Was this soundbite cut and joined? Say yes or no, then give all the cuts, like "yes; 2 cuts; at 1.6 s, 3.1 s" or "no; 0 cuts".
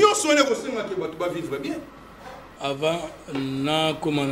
yes; 1 cut; at 2.4 s